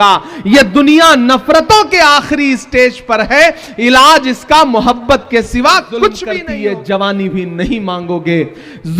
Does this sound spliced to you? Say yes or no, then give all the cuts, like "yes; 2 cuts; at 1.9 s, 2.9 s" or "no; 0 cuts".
yes; 1 cut; at 6.3 s